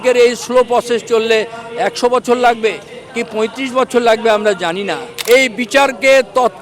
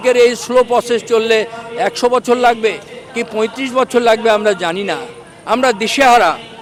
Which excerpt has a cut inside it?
first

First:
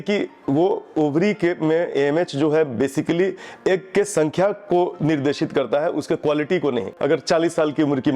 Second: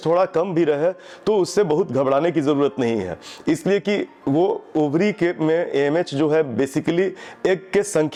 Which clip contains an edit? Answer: first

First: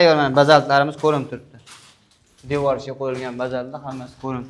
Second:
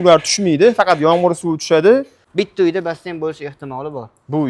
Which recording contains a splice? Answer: second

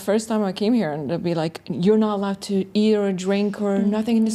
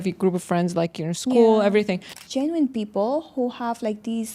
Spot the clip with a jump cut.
second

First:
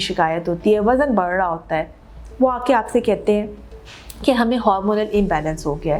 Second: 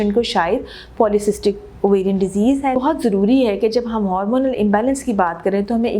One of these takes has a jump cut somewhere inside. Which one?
second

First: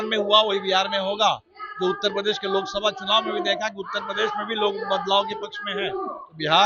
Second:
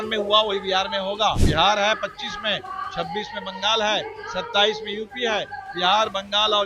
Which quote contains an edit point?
second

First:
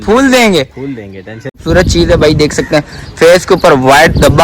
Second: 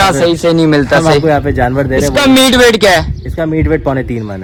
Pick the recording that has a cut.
first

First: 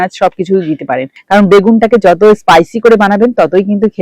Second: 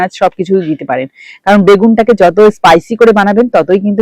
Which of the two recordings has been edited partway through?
first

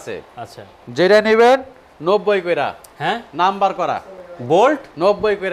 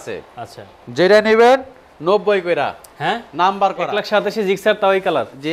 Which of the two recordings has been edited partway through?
second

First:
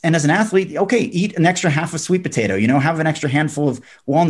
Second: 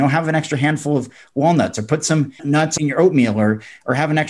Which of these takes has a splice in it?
second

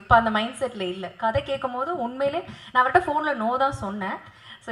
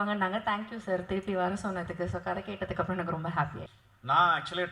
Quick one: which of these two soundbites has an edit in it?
second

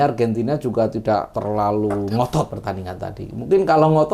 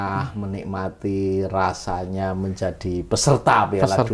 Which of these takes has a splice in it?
first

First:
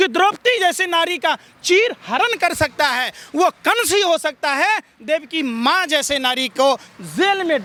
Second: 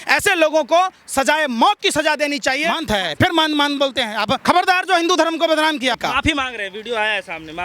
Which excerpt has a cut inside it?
second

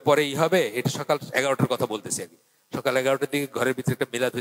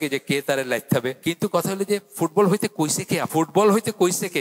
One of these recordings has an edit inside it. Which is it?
second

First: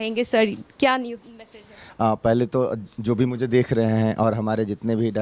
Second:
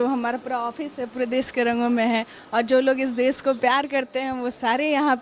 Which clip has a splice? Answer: second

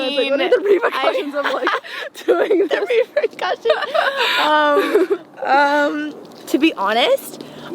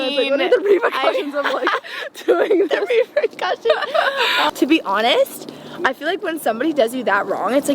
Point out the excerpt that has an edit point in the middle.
second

